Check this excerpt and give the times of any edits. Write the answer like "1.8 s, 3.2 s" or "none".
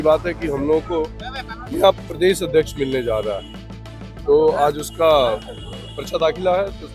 none